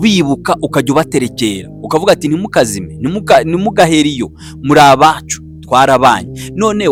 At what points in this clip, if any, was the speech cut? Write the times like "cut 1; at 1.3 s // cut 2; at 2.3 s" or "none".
none